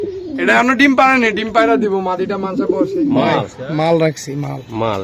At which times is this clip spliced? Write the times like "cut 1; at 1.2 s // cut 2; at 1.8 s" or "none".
cut 1; at 3.2 s